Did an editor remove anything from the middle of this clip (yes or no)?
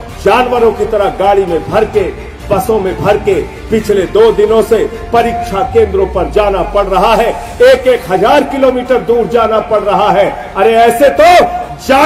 no